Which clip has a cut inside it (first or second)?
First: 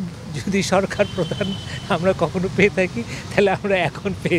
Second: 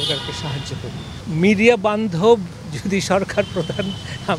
second